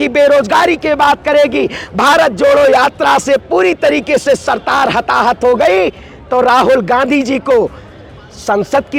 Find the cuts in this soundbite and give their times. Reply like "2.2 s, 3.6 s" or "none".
none